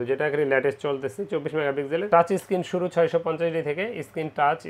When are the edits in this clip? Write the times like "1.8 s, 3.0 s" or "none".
2.1 s